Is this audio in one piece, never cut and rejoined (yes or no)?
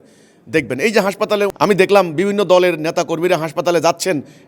no